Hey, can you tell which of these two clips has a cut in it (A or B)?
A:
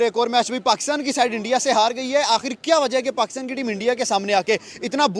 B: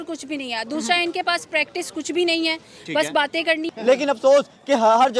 B